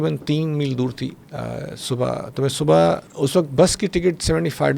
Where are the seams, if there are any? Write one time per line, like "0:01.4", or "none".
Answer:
0:01.2
0:03.1